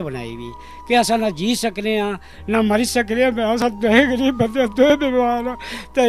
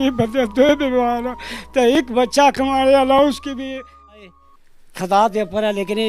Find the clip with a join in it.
second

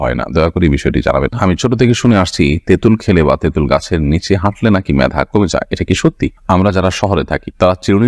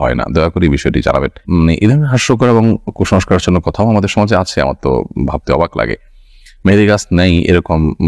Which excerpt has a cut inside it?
first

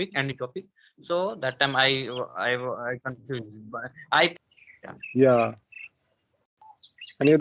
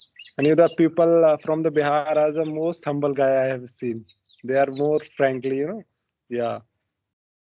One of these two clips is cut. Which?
first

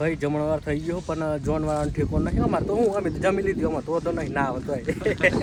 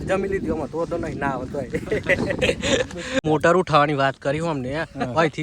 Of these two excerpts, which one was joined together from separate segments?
second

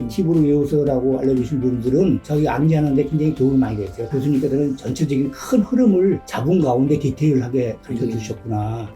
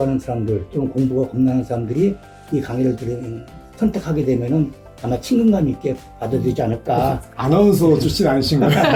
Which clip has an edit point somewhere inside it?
first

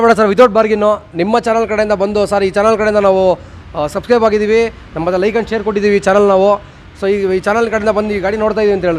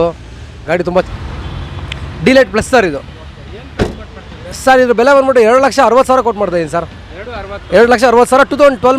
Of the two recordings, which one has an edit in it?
second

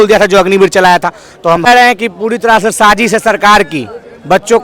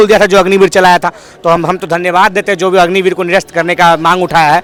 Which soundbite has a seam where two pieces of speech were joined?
first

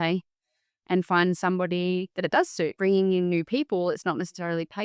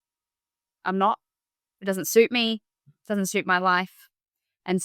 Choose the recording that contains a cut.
first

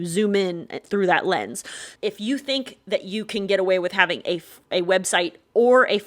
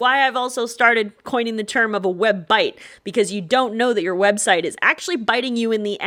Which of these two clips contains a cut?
first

